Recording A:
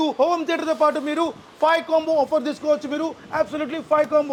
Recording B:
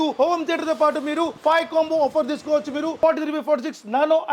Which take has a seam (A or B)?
B